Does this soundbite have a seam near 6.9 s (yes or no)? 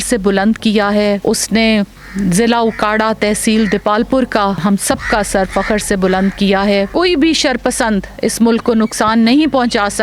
yes